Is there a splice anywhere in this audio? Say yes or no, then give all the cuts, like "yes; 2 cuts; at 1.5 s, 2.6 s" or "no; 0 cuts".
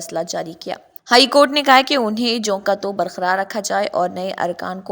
yes; 1 cut; at 0.9 s